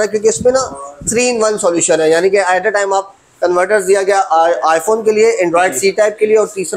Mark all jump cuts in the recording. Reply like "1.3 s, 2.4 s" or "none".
none